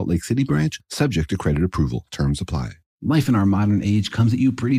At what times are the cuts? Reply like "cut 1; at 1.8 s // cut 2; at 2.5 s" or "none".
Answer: cut 1; at 2.9 s